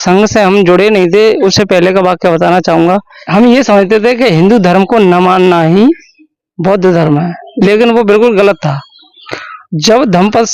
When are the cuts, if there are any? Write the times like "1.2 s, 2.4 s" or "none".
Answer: 3.1 s